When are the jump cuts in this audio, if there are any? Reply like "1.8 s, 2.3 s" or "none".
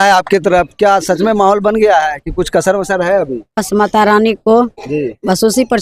none